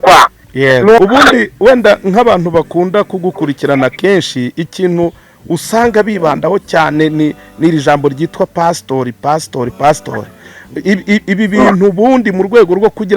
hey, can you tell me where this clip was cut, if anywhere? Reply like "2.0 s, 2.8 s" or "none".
1.0 s

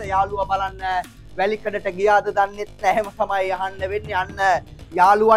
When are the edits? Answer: none

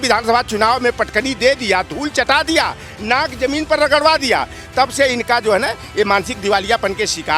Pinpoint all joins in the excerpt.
none

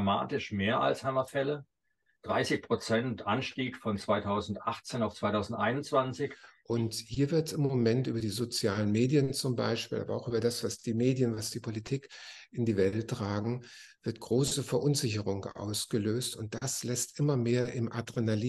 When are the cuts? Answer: 6.5 s

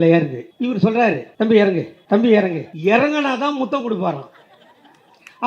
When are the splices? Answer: 0.9 s, 1.9 s, 2.7 s

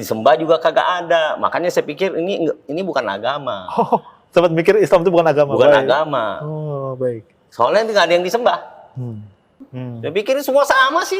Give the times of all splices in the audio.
9.5 s

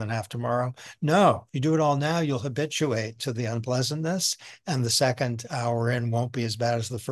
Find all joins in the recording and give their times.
1.5 s

